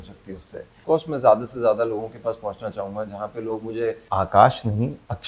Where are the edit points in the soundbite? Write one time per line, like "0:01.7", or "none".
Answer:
0:00.8
0:04.0